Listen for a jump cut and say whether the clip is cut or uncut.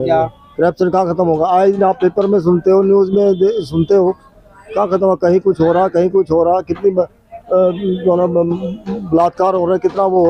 uncut